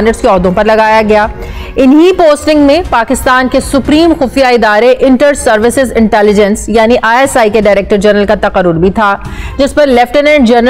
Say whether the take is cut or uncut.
uncut